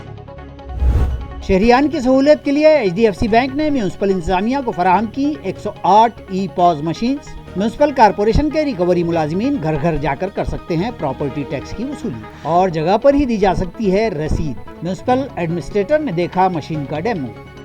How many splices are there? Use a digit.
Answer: 1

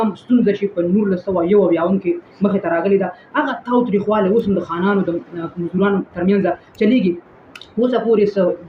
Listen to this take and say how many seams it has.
0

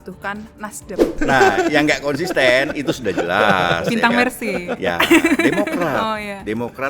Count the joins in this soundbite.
1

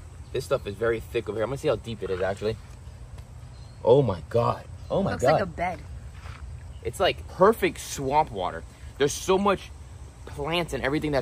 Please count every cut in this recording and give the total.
0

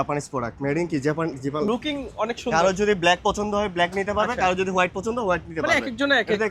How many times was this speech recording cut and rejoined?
1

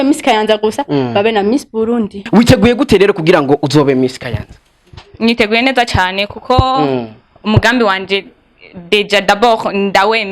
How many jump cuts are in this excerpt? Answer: 1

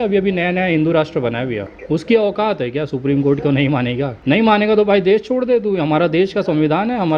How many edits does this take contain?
2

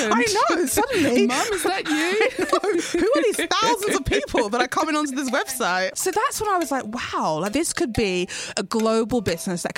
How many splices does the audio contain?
2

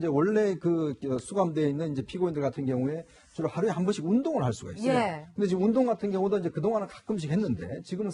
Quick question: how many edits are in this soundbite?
1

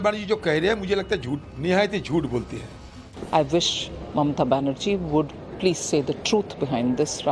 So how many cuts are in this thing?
2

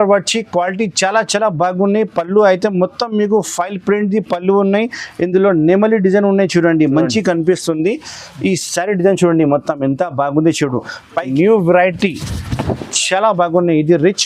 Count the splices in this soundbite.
1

